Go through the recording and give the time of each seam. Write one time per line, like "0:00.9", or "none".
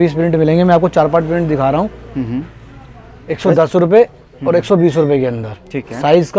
none